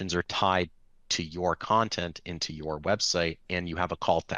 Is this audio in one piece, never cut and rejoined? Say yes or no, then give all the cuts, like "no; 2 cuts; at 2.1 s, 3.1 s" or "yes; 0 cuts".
yes; 0 cuts